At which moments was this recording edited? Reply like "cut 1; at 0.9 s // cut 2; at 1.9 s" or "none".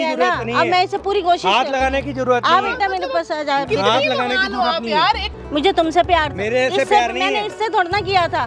cut 1; at 5.3 s